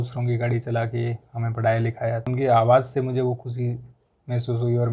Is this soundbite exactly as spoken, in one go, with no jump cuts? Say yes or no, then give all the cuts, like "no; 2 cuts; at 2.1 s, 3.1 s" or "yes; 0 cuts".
yes; 0 cuts